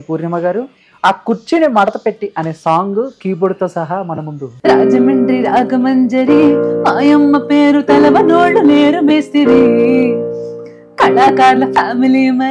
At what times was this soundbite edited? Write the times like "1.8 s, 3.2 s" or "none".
4.4 s